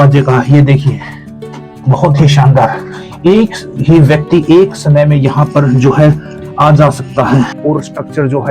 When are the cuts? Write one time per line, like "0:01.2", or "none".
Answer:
0:07.6